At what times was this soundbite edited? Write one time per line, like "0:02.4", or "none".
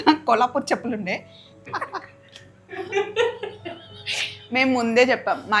0:01.6